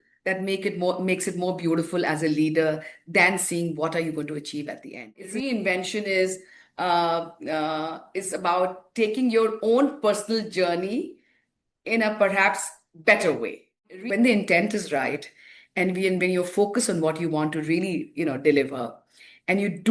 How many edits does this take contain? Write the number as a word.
two